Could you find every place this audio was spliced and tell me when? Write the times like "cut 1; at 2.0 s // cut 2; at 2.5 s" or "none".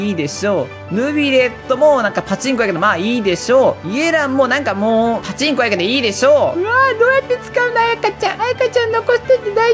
cut 1; at 5.3 s // cut 2; at 6.6 s